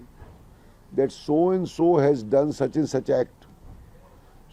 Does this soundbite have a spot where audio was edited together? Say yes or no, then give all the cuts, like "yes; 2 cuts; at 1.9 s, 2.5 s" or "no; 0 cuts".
no; 0 cuts